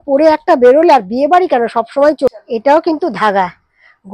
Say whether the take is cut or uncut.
cut